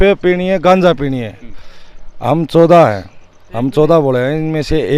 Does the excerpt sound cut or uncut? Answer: uncut